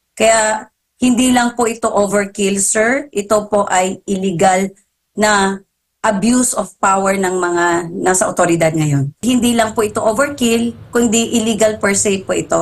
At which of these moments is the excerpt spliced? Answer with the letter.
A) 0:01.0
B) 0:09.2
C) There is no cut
B